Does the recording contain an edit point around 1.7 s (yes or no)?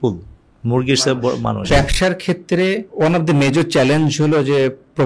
yes